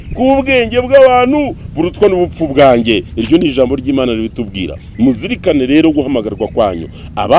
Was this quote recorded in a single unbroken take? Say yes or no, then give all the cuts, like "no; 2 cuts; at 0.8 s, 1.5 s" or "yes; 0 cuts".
yes; 0 cuts